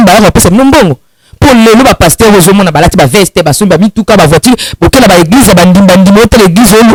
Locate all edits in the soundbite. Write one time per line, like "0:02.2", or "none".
none